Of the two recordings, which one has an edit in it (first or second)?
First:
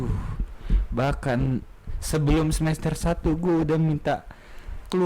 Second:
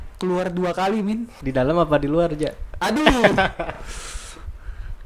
second